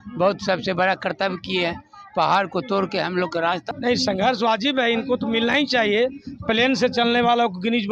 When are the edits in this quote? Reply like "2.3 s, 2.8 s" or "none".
3.7 s